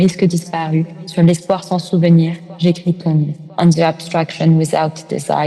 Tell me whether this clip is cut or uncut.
cut